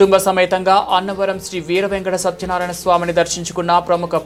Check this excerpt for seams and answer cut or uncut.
uncut